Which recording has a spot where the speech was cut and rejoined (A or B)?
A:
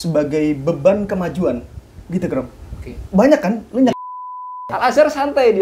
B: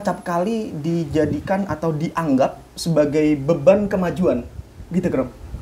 A